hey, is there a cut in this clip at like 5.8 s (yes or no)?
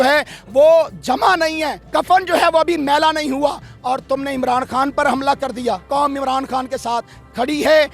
yes